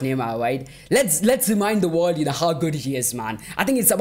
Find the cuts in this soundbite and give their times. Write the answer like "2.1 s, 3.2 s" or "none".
none